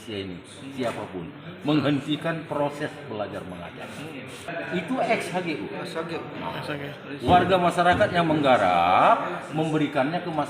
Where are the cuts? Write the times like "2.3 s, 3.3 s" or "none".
4.5 s